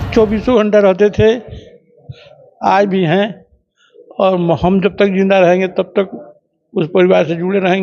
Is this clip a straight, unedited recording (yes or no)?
yes